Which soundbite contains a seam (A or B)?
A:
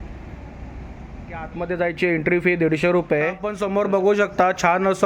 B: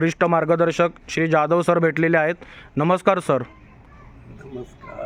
A